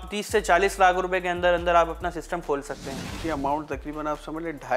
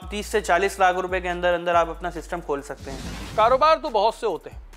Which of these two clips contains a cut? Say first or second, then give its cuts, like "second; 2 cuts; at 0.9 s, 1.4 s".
first; 1 cut; at 3.1 s